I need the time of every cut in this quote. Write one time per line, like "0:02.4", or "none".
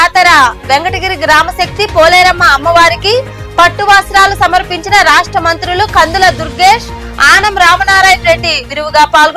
none